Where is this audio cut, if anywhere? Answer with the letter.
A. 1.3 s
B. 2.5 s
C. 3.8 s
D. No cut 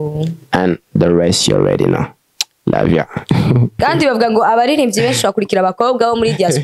C